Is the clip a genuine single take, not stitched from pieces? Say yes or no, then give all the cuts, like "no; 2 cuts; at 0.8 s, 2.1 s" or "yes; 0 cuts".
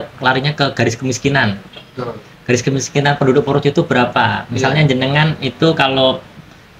yes; 0 cuts